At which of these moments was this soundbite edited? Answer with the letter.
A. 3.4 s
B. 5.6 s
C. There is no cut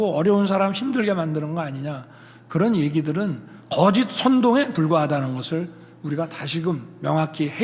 C